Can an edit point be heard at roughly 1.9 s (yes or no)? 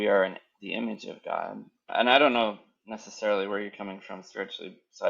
yes